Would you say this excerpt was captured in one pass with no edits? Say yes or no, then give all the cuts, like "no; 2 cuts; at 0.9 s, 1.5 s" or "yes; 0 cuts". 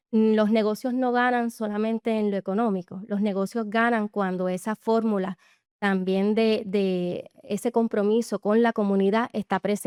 yes; 0 cuts